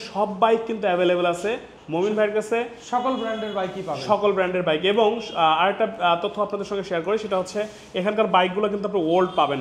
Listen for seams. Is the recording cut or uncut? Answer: uncut